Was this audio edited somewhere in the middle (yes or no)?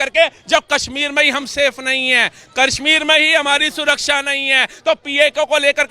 no